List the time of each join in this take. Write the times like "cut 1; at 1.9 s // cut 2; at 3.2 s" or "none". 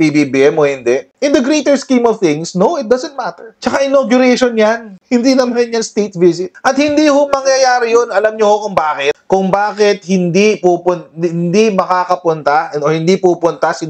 cut 1; at 6.5 s